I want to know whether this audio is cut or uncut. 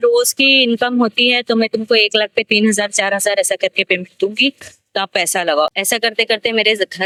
uncut